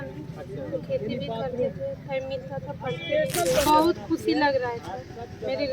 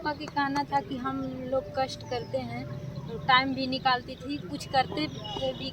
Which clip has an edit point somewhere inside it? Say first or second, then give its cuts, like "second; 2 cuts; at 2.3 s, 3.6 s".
first; 1 cut; at 3.7 s